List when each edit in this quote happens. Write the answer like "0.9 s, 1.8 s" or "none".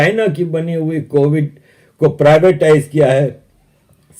none